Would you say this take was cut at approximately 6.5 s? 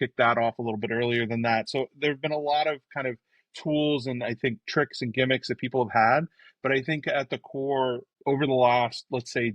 no; 1 cut; at 8.1 s

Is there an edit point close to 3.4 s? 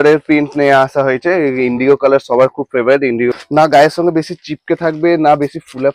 yes; 1 cut; at 3.4 s

